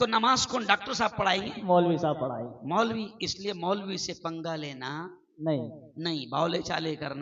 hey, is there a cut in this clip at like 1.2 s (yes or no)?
no